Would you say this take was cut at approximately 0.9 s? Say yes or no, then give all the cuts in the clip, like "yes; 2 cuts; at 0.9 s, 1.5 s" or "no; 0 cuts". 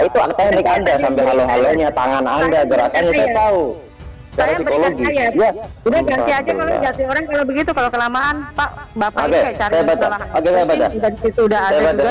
no; 2 cuts; at 5.8 s, 8.8 s